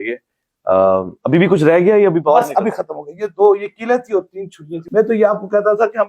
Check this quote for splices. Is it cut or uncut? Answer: cut